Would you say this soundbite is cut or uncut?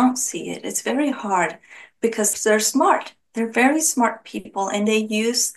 cut